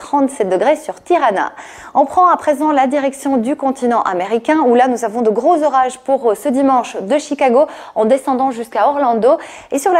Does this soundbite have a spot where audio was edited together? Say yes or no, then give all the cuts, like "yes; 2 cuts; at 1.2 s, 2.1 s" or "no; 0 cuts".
yes; 1 cut; at 1.8 s